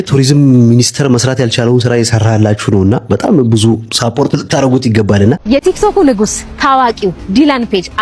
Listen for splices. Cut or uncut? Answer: cut